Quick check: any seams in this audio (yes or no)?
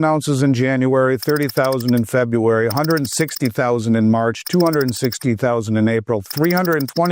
no